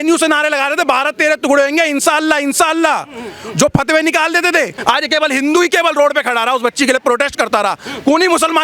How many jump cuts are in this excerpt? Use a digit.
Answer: 1